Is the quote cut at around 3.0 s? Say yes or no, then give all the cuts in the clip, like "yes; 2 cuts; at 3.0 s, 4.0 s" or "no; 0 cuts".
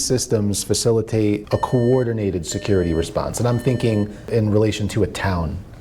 no; 2 cuts; at 1.4 s, 4.3 s